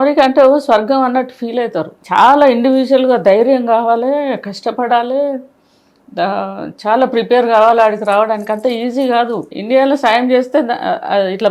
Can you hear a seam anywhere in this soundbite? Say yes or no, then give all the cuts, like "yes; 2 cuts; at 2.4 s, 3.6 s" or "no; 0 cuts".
yes; 2 cuts; at 2.0 s, 9.5 s